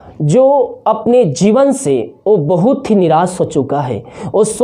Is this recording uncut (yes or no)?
yes